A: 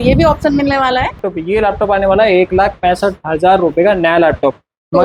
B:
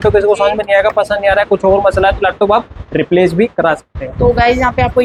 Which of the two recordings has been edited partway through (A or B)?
A